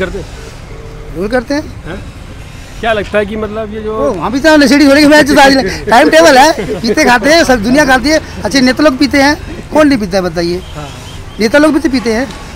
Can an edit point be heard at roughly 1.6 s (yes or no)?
no